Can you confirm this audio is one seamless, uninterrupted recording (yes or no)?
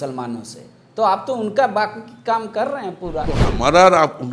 no